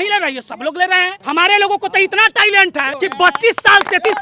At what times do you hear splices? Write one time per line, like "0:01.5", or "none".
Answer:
0:01.2
0:02.9